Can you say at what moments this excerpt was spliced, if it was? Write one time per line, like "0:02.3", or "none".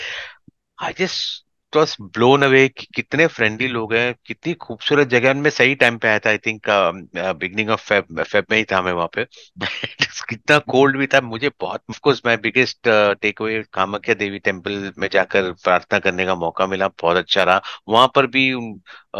0:12.0